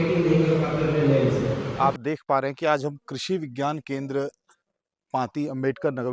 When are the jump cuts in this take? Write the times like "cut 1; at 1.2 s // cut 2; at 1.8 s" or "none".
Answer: cut 1; at 1.7 s